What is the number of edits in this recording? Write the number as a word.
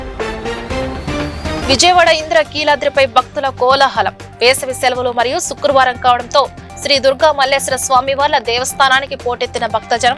one